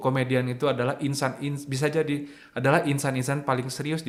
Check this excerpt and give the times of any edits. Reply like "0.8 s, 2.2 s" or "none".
none